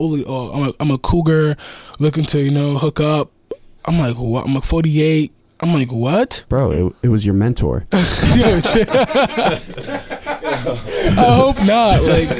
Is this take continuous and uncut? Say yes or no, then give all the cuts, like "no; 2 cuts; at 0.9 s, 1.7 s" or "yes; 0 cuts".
yes; 0 cuts